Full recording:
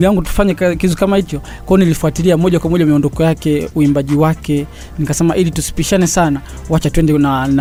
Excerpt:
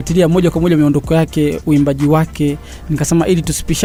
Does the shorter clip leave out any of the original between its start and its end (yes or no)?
no